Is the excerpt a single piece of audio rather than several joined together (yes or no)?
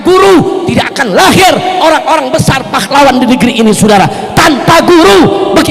yes